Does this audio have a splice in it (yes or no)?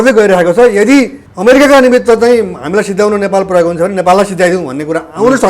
yes